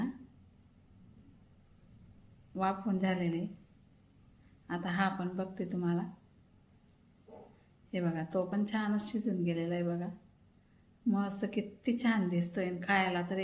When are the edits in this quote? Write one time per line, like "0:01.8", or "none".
none